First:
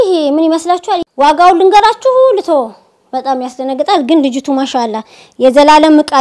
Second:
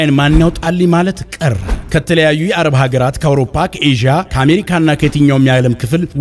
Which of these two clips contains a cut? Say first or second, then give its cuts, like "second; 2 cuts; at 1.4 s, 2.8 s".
first; 1 cut; at 1.0 s